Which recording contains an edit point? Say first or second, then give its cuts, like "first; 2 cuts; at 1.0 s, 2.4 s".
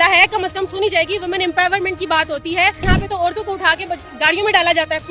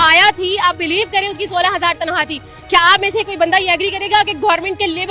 first; 1 cut; at 2.8 s